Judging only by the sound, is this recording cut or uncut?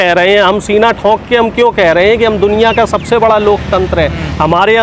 uncut